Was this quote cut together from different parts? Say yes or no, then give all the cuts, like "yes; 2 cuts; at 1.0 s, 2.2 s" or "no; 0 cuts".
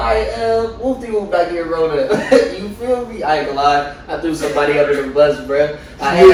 no; 0 cuts